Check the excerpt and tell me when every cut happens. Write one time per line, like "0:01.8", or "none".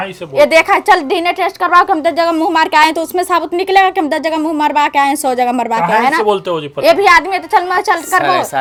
none